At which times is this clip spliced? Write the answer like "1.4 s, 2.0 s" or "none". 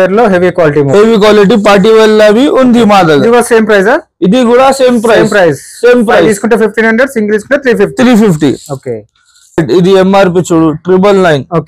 9.6 s